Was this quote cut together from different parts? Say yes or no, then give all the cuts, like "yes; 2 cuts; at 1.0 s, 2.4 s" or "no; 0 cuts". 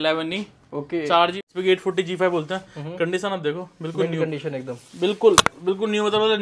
yes; 1 cut; at 1.3 s